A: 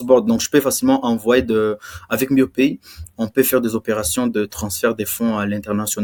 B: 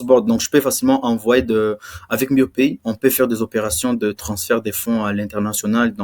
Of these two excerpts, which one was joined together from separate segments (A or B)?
B